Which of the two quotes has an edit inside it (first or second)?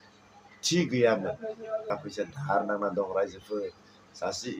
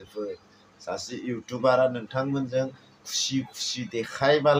first